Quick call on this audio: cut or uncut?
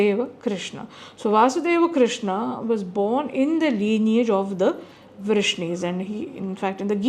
uncut